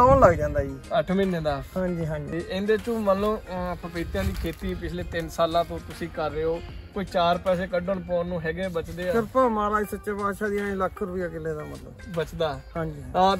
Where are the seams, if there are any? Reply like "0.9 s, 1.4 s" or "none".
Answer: 2.3 s